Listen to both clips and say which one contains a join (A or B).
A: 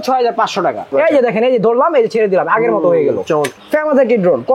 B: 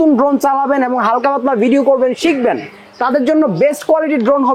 A